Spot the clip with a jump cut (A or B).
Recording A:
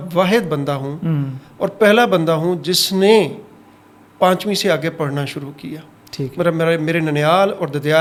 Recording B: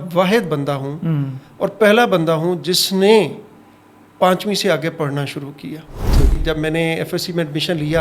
B